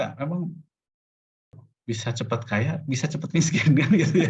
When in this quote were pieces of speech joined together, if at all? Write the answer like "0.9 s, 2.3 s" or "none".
1.6 s